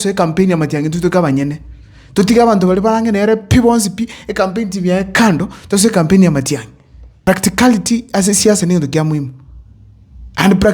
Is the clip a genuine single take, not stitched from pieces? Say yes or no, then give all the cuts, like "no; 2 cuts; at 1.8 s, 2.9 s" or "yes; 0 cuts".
no; 1 cut; at 7.1 s